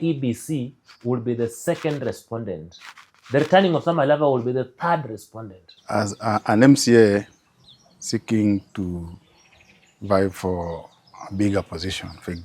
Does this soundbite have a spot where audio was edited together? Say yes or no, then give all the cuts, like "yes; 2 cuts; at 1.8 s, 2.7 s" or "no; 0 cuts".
yes; 1 cut; at 5.8 s